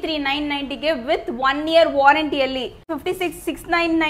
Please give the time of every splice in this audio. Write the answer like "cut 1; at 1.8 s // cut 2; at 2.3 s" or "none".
cut 1; at 2.9 s